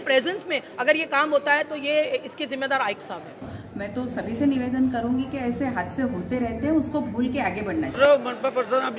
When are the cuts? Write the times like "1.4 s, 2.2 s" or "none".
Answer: 3.4 s, 8.0 s